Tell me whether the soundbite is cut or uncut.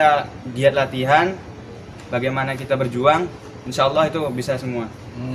cut